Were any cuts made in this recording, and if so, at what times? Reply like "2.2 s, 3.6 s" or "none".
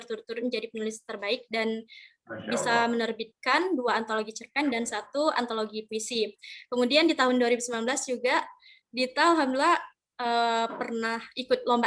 none